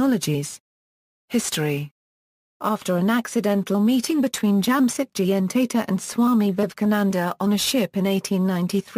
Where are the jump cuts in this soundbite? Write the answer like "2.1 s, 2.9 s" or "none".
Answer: none